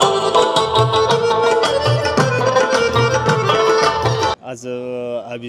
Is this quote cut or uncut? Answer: cut